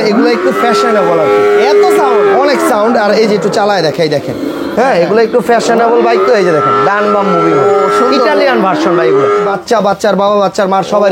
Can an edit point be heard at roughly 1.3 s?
no; 1 cut; at 9.5 s

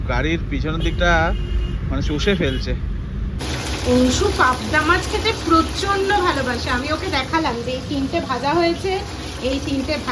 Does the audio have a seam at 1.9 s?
no; 1 cut; at 3.4 s

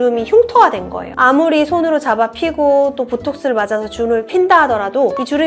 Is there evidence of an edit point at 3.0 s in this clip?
no; 0 cuts

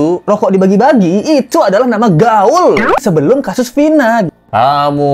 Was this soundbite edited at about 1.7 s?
no; 2 cuts; at 3.0 s, 4.3 s

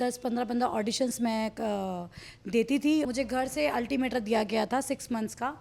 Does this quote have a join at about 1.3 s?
no; 1 cut; at 3.1 s

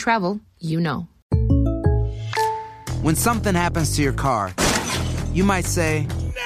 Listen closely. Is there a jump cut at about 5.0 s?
no; 2 cuts; at 1.1 s, 2.8 s

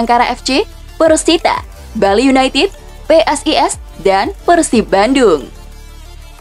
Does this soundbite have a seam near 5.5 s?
yes; 1 cut; at 5.5 s

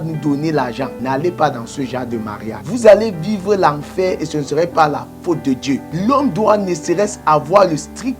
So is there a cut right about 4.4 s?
no; 3 cuts; at 1.0 s, 2.6 s, 5.9 s

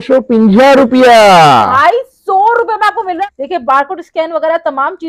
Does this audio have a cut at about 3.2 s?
yes; 1 cut; at 3.2 s

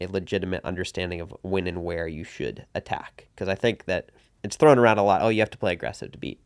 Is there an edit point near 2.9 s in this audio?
no; 0 cuts

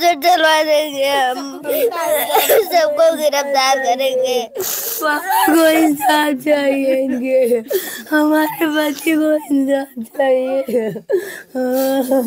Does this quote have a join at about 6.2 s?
no; 0 cuts

